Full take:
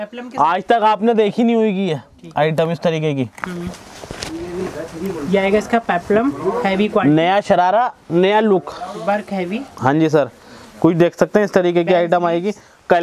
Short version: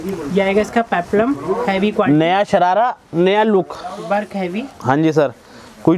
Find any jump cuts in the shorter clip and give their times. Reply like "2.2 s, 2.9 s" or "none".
none

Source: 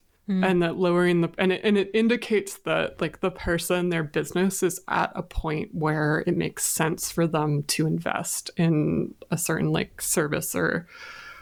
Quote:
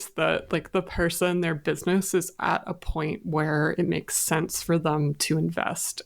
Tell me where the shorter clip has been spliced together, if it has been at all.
none

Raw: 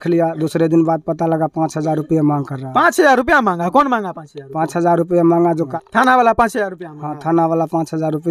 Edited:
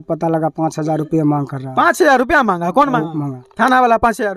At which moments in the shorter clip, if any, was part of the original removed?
3.4 s

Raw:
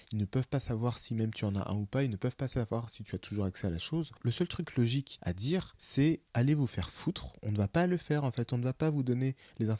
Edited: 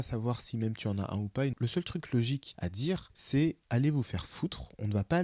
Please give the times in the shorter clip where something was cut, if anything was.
1.6 s

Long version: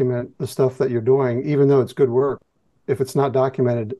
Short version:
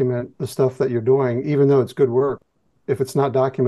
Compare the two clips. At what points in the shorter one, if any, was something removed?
none

